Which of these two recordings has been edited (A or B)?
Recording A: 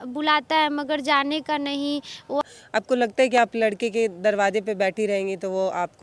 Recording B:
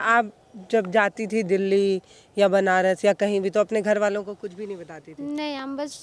A